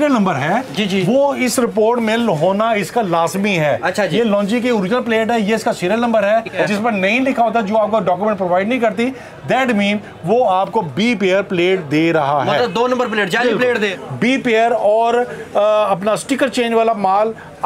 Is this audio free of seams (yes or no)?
no